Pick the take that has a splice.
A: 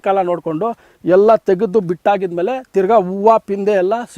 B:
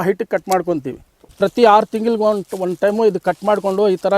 B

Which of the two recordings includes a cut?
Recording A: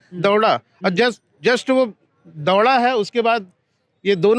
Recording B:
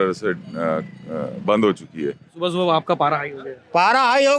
B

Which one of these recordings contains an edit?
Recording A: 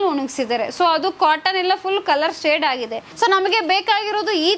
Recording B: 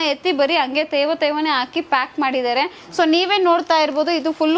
A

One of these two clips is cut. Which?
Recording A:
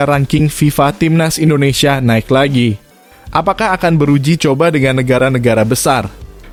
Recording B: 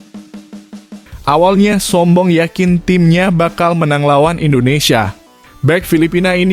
B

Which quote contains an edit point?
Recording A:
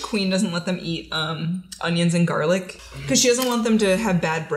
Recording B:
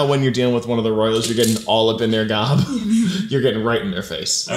A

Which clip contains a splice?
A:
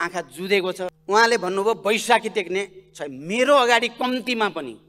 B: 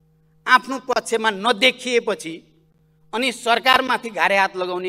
A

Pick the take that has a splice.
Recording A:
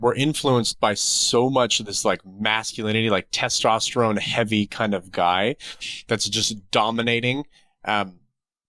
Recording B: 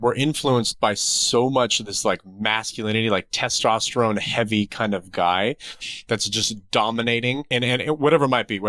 B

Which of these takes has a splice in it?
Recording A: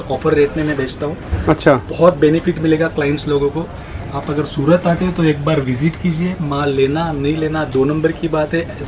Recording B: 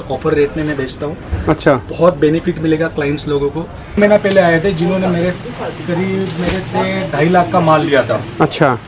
B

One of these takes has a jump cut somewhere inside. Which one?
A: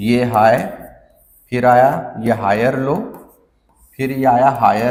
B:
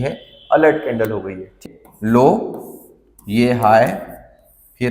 B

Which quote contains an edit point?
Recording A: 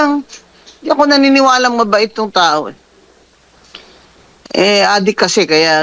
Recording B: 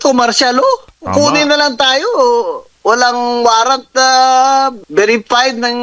B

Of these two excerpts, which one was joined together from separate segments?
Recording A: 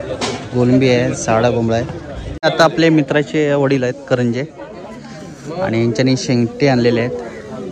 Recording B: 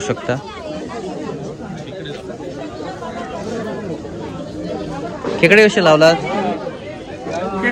A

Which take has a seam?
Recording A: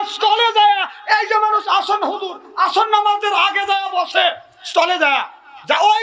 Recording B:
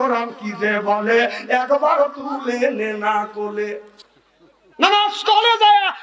B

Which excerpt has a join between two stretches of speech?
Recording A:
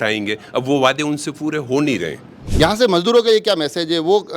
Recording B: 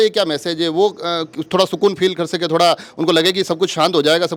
A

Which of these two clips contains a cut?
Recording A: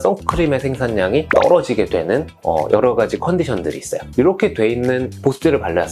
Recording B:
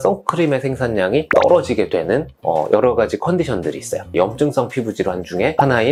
A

